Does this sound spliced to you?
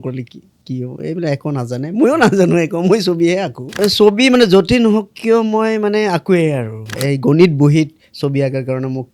yes; 2 cuts; at 3.8 s, 7.0 s

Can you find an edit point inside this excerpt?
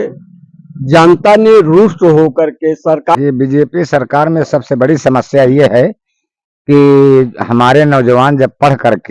yes; 1 cut; at 3.1 s

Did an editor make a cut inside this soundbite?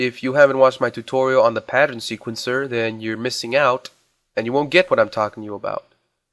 yes; 1 cut; at 5.1 s

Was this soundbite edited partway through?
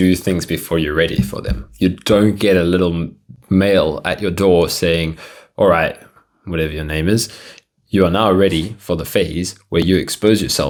no; 0 cuts

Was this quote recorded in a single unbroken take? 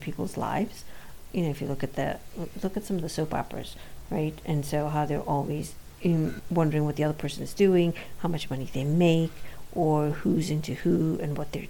no; 2 cuts; at 1.1 s, 6.4 s

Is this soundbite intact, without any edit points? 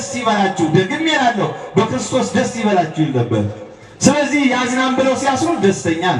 yes; 0 cuts

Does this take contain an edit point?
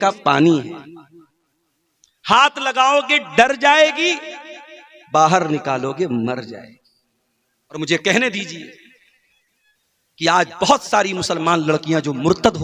yes; 1 cut; at 7.8 s

